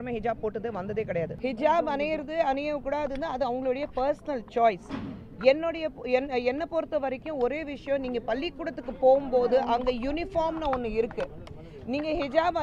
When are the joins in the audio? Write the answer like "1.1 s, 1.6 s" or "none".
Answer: 1.3 s